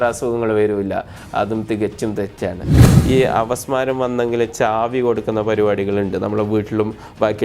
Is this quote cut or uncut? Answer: cut